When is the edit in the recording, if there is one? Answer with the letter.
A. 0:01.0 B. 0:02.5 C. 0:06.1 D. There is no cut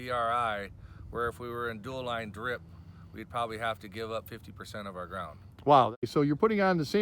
C